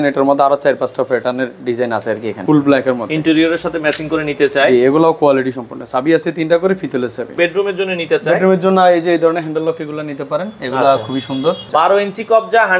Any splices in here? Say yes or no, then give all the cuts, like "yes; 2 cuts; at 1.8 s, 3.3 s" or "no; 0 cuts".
yes; 3 cuts; at 2.4 s, 7.4 s, 11.6 s